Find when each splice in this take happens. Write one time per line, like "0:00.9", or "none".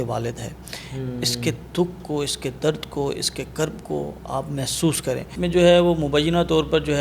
0:05.3